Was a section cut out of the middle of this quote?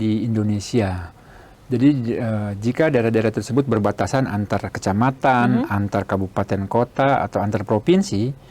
no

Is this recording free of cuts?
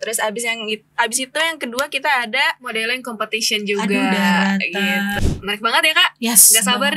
no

